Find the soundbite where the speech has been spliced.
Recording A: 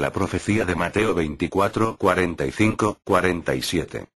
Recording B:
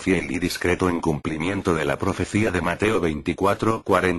B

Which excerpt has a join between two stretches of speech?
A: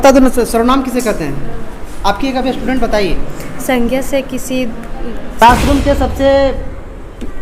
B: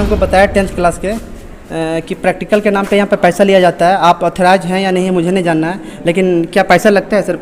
A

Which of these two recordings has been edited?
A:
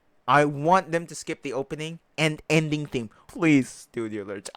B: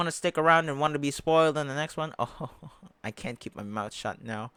A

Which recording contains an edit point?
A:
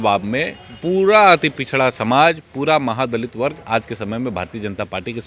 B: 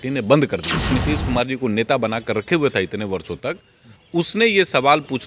B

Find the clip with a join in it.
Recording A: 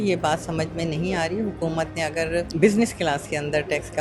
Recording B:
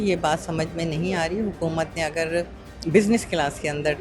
A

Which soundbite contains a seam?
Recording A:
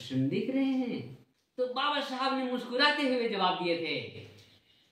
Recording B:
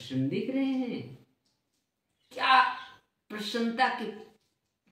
A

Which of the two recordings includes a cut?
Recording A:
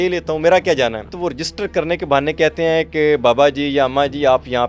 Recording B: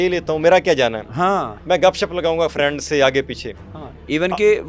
A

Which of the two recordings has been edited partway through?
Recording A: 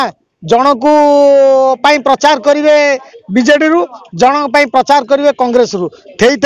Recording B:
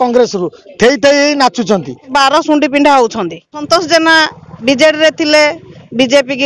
B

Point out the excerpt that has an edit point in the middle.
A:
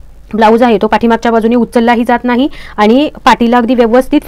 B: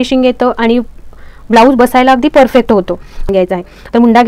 B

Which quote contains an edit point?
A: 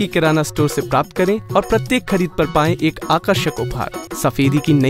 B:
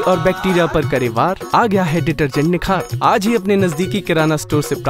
A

